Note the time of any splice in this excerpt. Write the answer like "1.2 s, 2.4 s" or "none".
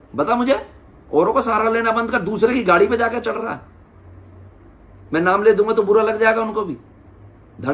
none